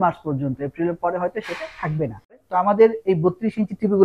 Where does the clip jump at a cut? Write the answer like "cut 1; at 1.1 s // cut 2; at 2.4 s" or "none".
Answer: cut 1; at 2.3 s